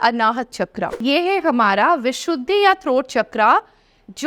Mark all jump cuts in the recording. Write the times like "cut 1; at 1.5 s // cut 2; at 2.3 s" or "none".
cut 1; at 1.0 s